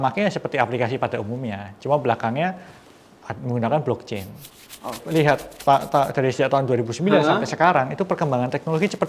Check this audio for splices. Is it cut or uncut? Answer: cut